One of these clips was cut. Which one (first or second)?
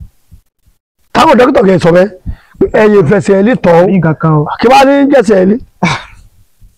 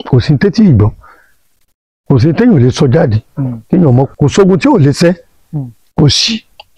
second